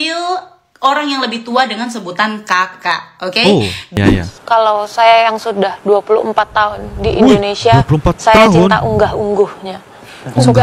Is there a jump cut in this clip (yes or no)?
yes